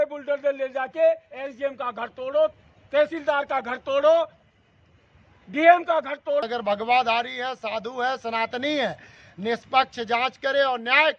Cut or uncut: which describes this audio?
cut